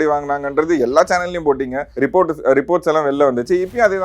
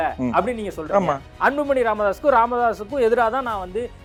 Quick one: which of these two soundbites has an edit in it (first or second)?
first